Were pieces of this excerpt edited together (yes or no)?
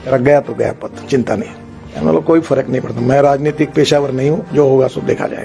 yes